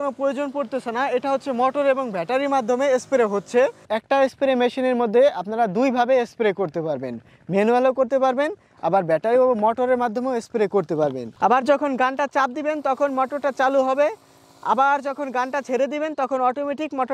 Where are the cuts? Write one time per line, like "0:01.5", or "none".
0:03.8
0:11.3